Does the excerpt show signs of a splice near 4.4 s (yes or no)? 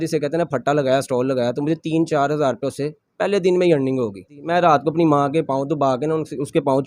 yes